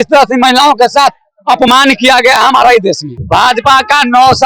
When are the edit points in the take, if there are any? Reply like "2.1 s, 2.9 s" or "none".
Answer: 3.1 s